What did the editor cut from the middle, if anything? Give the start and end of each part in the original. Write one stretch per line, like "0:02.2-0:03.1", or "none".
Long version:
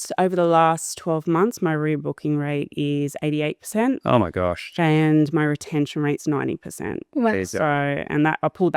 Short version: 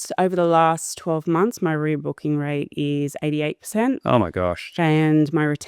none